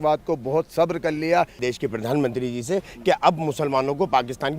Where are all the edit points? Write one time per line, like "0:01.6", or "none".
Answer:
0:01.6